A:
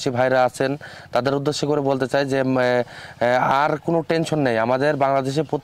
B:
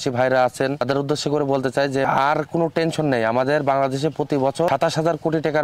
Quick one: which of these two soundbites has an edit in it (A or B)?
B